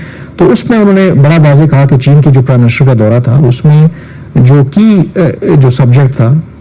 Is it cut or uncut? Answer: uncut